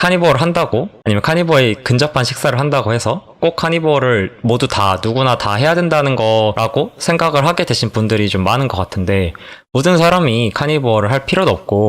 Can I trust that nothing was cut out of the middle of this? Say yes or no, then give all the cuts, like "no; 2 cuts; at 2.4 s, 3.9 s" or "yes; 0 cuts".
no; 3 cuts; at 0.9 s, 3.4 s, 6.6 s